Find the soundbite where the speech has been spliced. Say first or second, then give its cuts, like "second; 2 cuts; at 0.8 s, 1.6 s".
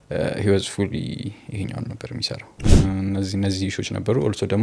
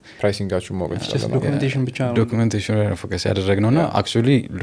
first; 1 cut; at 2.7 s